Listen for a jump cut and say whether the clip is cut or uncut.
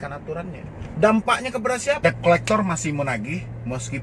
cut